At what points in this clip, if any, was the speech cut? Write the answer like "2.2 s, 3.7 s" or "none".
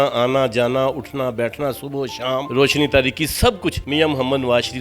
2.5 s, 3.8 s